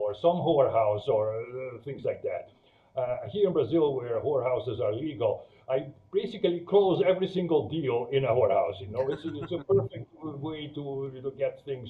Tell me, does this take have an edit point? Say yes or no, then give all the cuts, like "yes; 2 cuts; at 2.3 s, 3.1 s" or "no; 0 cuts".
no; 0 cuts